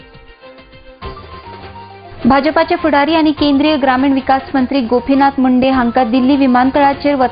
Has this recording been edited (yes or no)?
no